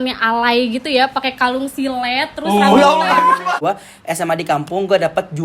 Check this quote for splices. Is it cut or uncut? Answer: cut